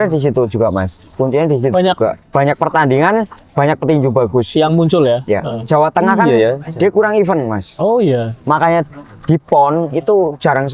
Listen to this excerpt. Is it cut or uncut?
uncut